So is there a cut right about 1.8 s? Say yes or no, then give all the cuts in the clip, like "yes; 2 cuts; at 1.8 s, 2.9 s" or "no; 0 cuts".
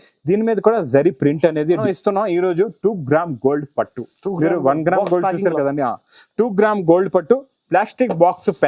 yes; 1 cut; at 1.8 s